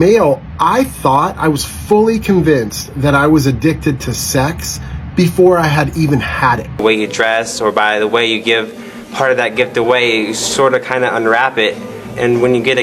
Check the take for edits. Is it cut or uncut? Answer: cut